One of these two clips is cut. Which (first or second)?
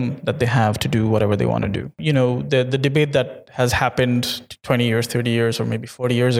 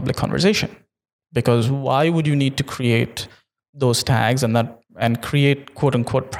first